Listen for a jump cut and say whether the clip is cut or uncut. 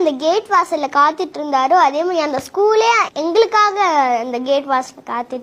uncut